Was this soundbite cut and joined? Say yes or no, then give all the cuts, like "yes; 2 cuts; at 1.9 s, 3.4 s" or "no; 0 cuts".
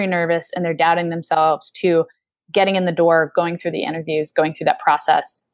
no; 0 cuts